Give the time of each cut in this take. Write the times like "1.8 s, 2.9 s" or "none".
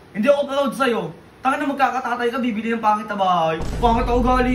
3.6 s